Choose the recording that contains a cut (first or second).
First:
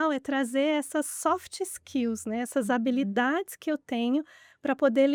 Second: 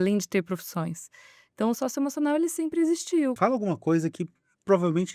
second